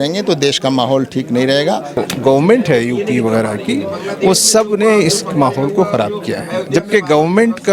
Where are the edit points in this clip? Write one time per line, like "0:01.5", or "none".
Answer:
0:02.0